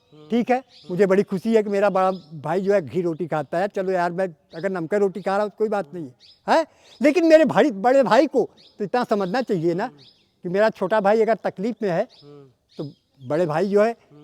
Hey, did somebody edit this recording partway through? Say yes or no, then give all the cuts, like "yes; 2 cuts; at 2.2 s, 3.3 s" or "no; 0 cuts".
no; 0 cuts